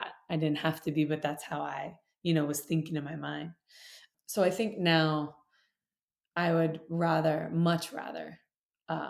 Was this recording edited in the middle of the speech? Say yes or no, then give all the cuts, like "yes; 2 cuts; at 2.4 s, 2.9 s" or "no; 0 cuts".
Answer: yes; 1 cut; at 4.1 s